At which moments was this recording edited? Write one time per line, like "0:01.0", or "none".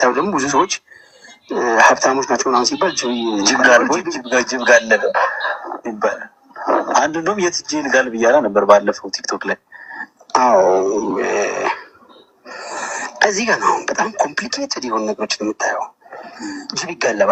none

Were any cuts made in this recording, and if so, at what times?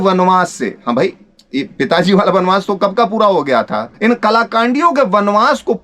0:03.8

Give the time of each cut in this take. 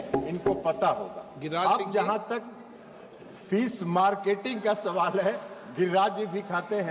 none

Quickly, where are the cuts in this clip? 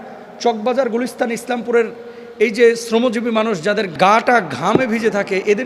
0:03.9

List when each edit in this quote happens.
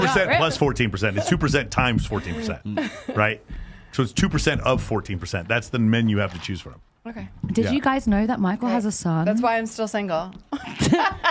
none

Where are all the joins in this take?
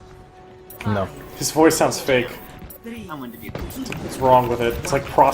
0:03.7

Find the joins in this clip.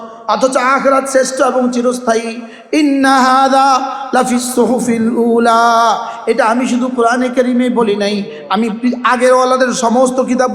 none

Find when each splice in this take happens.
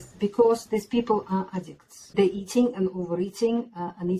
0:02.1

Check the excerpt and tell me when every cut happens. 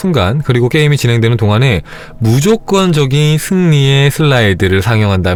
none

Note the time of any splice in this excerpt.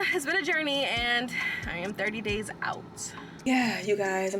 0:03.5

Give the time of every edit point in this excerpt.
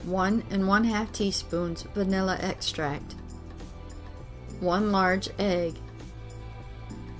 0:03.0
0:04.6
0:05.7

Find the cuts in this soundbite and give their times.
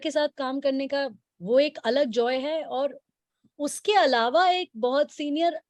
none

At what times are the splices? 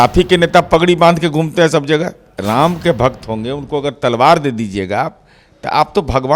0:02.3

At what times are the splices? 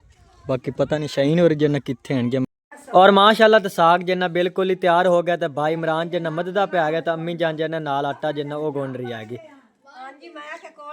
0:02.4

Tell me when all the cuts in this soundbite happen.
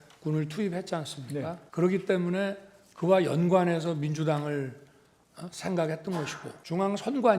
0:01.6
0:06.5

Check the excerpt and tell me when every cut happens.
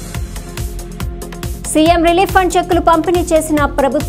0:01.1

